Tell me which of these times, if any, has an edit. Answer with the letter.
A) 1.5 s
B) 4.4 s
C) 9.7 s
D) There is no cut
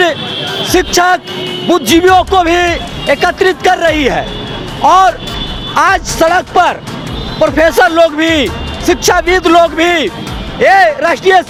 D